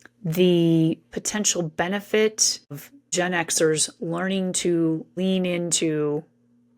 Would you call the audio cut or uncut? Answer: cut